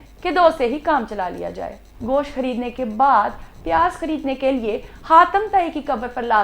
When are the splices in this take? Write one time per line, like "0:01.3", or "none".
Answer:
0:01.9